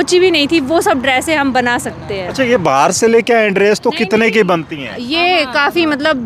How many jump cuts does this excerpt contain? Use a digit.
0